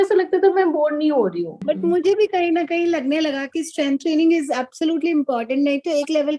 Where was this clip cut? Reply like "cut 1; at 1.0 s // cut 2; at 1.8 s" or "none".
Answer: cut 1; at 1.5 s